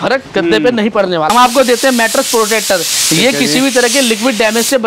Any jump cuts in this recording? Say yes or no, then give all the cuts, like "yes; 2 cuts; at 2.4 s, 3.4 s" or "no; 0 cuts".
yes; 1 cut; at 1.3 s